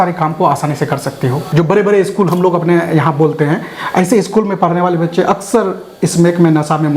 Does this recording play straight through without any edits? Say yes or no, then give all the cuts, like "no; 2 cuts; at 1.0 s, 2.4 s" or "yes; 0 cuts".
no; 1 cut; at 1.4 s